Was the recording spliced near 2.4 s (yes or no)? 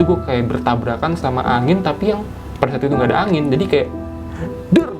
yes